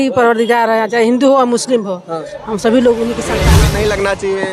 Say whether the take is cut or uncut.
cut